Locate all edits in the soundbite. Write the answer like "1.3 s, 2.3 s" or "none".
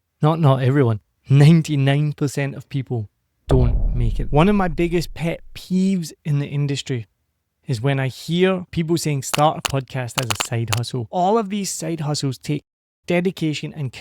4.2 s, 8.7 s, 11.1 s